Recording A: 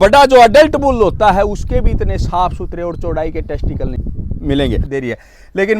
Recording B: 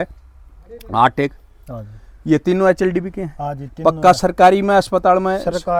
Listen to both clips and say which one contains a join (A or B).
A